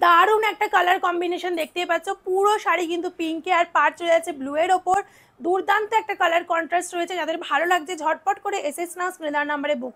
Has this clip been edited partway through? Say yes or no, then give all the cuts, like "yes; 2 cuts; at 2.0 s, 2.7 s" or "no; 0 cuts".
no; 0 cuts